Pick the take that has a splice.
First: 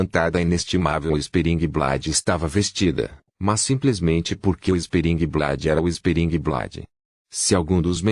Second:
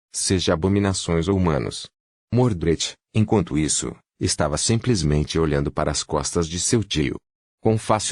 first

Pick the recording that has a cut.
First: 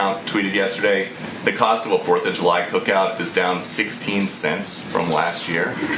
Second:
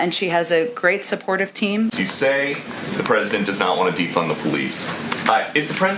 second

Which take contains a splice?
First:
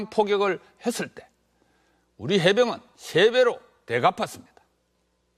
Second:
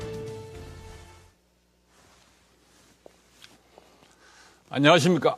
first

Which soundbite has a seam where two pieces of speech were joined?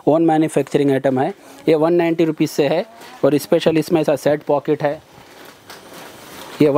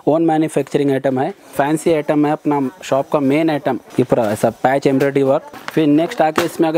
second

